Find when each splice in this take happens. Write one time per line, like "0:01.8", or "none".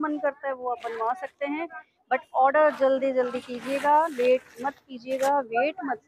none